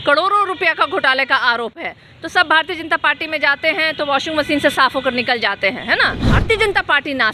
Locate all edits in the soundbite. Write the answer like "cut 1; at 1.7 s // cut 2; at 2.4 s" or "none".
cut 1; at 6.2 s